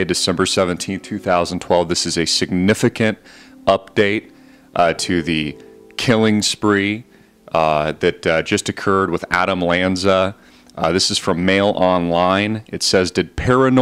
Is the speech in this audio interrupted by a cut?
no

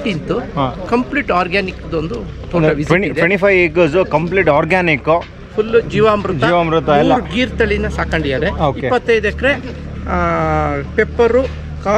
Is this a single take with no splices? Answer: yes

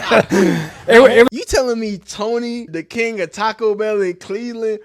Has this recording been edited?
yes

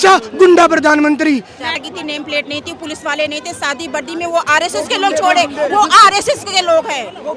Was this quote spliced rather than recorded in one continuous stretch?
yes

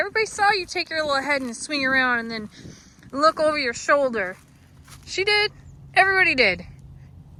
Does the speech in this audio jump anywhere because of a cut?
no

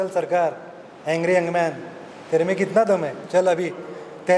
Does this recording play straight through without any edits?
yes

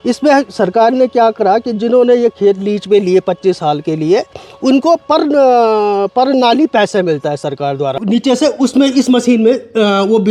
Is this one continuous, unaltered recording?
no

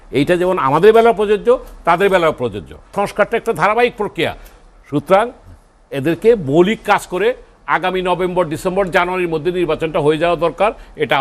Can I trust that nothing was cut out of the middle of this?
no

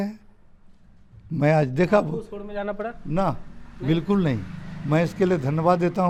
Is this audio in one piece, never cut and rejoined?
yes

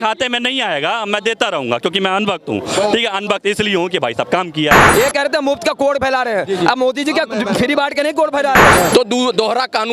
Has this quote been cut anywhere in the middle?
yes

